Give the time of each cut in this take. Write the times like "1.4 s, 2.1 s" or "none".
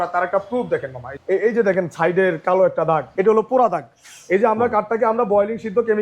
1.1 s, 3.1 s

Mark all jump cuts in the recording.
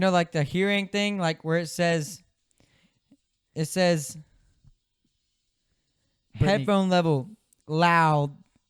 none

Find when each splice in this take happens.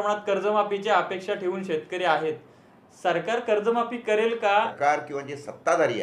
4.7 s

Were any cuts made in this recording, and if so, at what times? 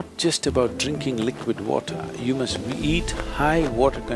none

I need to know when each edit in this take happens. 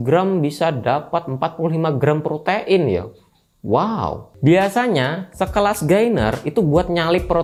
none

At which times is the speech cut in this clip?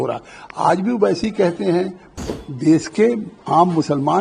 2.2 s

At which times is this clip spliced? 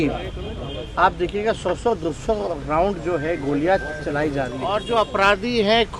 4.8 s

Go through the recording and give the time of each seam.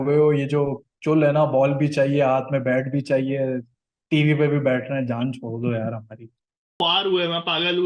6.7 s

